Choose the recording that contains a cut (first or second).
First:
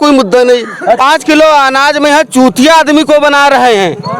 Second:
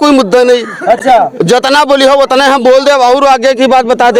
first